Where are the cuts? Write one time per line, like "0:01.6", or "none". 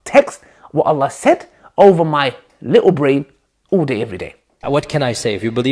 0:04.6